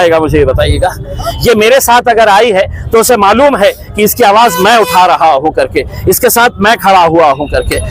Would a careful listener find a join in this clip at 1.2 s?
yes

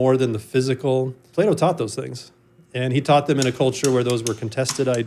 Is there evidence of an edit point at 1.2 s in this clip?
yes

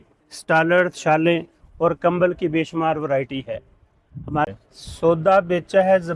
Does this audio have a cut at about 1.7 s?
no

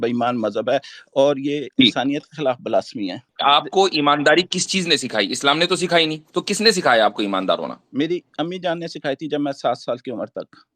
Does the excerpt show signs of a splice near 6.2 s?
no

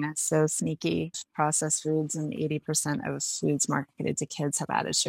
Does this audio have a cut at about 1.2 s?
yes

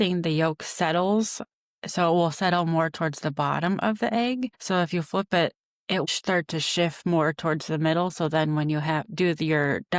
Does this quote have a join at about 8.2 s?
no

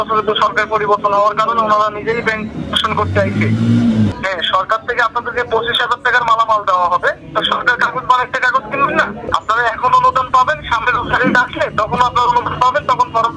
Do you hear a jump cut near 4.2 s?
yes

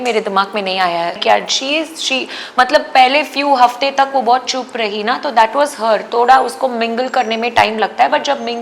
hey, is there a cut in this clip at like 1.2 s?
yes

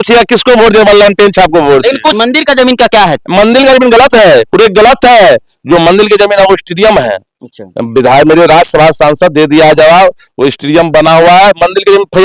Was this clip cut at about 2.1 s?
yes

